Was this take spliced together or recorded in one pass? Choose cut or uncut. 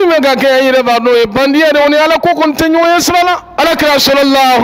cut